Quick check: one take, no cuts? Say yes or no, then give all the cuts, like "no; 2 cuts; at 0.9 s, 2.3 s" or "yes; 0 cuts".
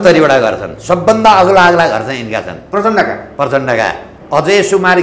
no; 1 cut; at 4.1 s